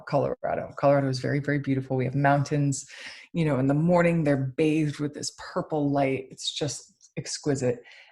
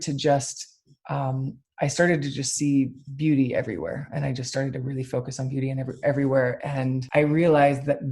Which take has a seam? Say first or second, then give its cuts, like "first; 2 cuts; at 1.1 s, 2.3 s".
second; 1 cut; at 7.0 s